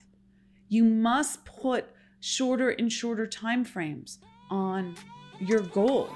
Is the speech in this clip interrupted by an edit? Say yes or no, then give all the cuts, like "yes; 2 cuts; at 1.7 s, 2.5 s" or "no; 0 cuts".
no; 0 cuts